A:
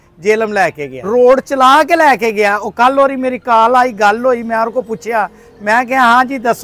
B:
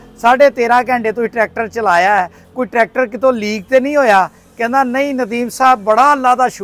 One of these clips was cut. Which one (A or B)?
A